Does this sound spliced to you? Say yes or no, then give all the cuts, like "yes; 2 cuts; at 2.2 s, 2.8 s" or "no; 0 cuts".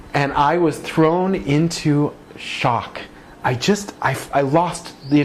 no; 0 cuts